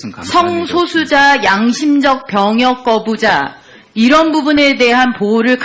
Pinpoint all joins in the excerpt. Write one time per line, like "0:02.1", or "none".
0:01.3